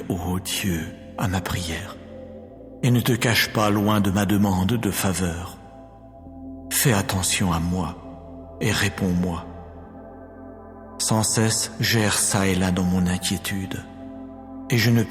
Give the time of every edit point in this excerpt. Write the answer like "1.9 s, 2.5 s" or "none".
9.4 s, 10.7 s